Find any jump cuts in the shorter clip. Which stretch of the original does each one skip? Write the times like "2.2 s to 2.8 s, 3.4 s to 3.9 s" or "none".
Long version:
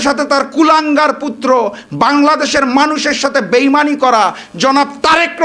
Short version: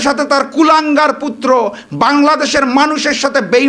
none